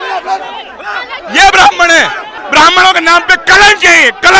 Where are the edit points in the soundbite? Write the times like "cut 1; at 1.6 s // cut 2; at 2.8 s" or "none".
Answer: cut 1; at 2.3 s